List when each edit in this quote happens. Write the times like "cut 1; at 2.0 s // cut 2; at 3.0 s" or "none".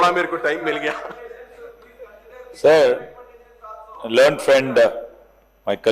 none